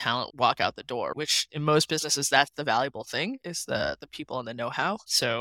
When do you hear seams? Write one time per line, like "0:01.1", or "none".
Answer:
0:01.4